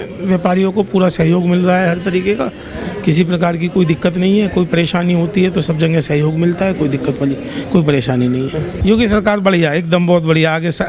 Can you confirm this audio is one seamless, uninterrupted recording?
no; 1 cut; at 8.7 s

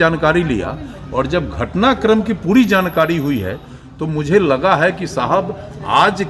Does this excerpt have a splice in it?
no; 0 cuts

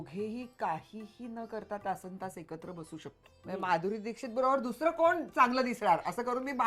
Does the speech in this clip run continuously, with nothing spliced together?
no; 1 cut; at 3.6 s

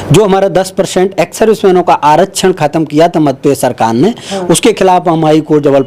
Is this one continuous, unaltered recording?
yes; 0 cuts

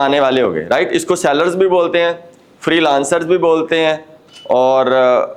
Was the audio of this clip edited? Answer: no; 0 cuts

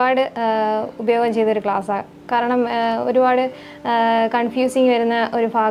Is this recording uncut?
yes; 0 cuts

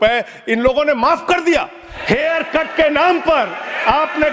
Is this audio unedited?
no; 1 cut; at 1.9 s

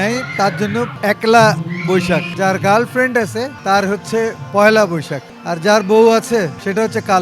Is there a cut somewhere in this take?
yes; 3 cuts; at 0.9 s, 2.3 s, 3.5 s

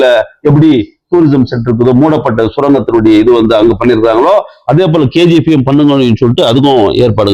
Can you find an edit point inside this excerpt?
no; 0 cuts

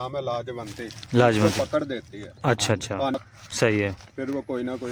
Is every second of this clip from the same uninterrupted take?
no; 1 cut; at 3.1 s

